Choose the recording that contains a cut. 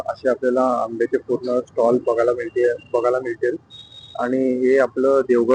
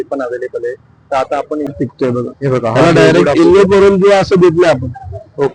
second; 1 cut; at 1.7 s

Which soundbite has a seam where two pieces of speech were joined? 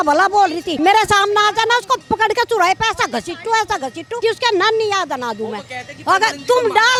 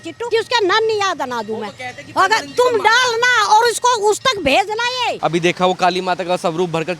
second; 1 cut; at 5.2 s

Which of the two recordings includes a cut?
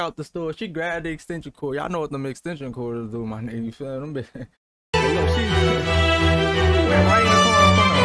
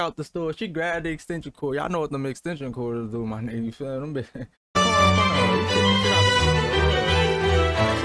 second; 1 cut; at 4.8 s

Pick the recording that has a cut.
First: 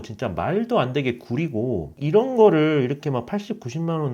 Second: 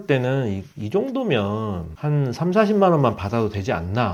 first; 1 cut; at 1.9 s

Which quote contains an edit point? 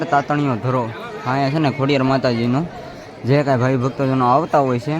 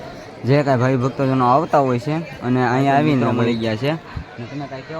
second; 1 cut; at 3.4 s

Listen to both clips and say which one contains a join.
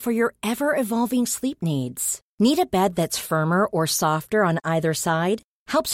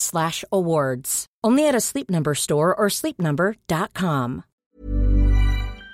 second; 1 cut; at 4.5 s

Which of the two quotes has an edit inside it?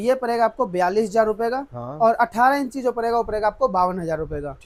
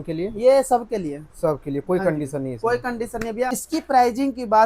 second; 1 cut; at 3.6 s

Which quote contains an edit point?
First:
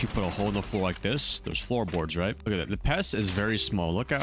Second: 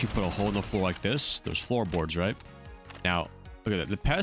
first; 1 cut; at 2.4 s

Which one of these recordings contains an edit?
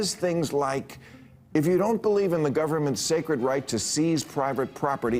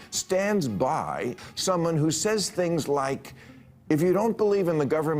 second; 1 cut; at 1.4 s

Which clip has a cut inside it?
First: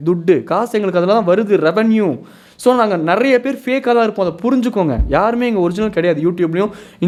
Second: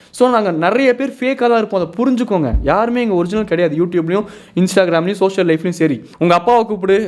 second; 1 cut; at 6.1 s

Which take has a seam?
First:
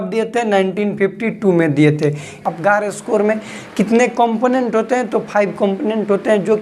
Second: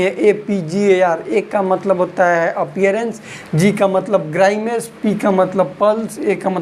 first; 1 cut; at 2.4 s

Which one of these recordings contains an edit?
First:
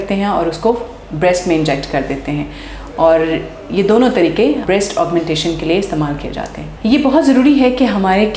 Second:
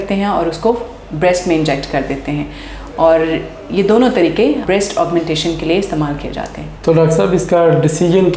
first; 1 cut; at 6.6 s

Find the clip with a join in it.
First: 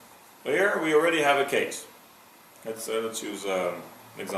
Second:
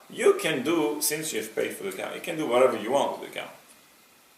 first; 1 cut; at 1.7 s

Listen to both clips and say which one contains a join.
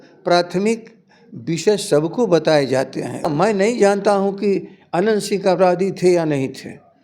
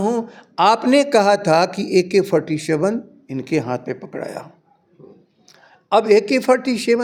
first; 1 cut; at 3.3 s

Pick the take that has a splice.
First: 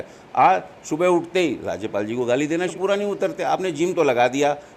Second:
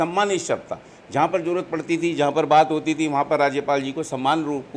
first; 1 cut; at 2.7 s

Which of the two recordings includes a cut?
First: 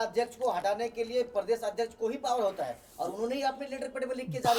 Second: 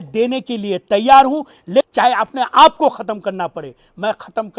second; 1 cut; at 1.9 s

